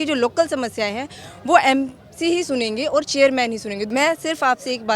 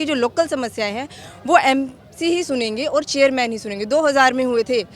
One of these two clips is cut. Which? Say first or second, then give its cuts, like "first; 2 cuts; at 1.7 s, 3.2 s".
first; 1 cut; at 3.8 s